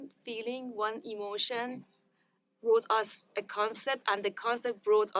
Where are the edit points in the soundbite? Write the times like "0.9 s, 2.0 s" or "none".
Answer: none